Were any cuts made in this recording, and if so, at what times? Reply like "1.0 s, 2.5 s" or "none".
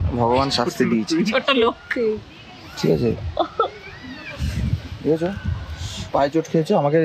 none